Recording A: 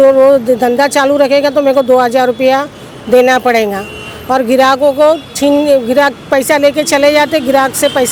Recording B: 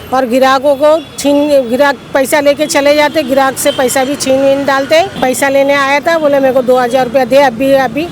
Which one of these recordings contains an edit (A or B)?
B